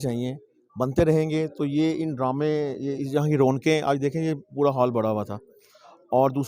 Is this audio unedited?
yes; 0 cuts

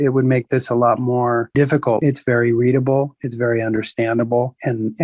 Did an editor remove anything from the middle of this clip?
yes; 1 cut; at 2.0 s

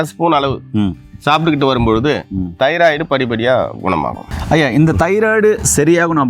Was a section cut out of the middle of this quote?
yes; 1 cut; at 4.2 s

